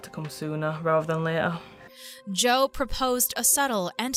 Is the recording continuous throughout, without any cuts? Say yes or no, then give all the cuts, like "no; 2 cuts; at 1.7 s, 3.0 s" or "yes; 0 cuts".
yes; 0 cuts